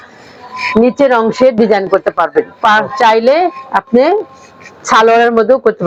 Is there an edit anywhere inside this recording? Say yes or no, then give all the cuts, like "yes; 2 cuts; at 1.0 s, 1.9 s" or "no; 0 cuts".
no; 0 cuts